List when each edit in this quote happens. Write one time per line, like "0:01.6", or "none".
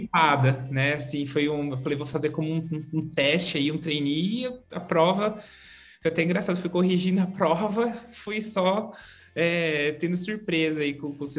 none